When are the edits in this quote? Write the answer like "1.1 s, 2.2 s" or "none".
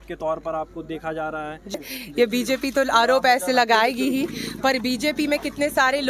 1.8 s